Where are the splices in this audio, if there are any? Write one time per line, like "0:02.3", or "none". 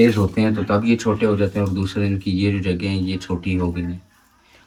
none